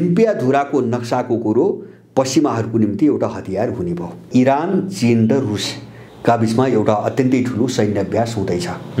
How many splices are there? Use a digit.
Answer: 1